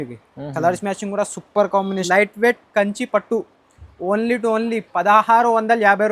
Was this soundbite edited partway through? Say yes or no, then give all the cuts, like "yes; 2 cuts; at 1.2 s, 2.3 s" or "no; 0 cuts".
yes; 1 cut; at 2.0 s